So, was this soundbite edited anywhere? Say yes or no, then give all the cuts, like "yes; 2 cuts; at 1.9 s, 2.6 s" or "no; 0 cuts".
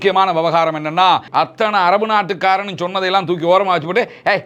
yes; 1 cut; at 1.3 s